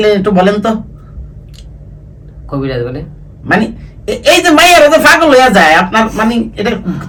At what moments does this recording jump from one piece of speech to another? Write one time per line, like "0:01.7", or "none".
none